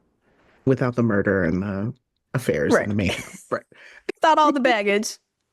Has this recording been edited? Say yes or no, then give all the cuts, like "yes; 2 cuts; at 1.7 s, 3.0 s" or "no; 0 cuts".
yes; 1 cut; at 4.1 s